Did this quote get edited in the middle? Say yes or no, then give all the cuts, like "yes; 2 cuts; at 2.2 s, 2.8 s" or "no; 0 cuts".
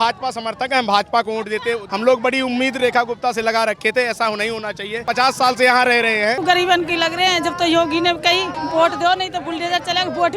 yes; 4 cuts; at 1.8 s, 5.0 s, 6.4 s, 8.6 s